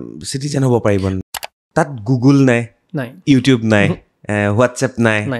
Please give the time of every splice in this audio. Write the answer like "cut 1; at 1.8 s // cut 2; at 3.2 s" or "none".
cut 1; at 1.2 s